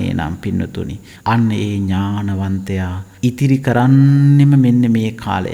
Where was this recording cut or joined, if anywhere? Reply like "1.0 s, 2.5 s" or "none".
1.0 s, 3.0 s